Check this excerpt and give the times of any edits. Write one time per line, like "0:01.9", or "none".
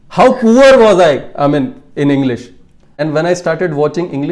0:02.9